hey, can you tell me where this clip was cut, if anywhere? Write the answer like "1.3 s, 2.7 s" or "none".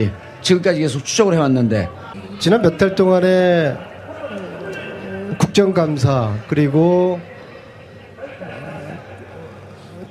none